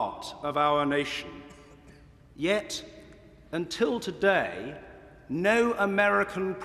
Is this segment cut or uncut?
cut